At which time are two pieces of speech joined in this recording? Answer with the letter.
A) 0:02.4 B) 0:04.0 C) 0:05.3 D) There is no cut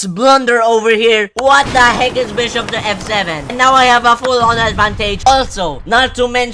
C